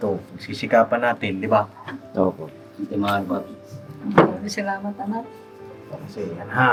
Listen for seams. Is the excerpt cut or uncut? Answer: uncut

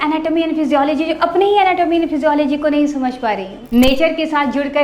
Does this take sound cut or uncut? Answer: cut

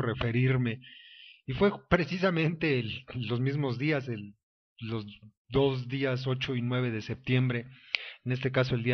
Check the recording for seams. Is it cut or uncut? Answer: cut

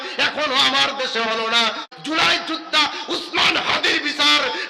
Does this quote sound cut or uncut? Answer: cut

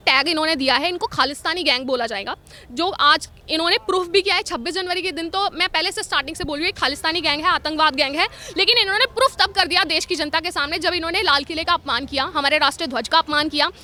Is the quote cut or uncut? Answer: uncut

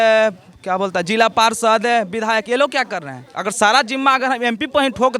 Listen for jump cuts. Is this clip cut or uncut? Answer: uncut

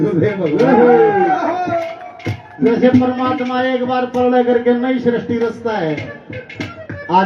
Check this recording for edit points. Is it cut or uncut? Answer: uncut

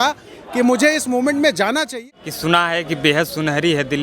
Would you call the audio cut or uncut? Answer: cut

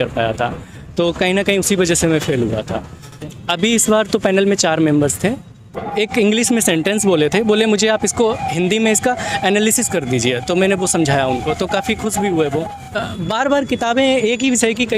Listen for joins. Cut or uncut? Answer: cut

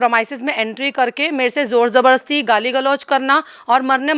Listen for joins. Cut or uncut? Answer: uncut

